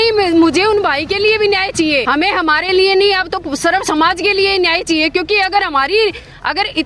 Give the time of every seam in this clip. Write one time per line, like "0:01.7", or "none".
0:02.0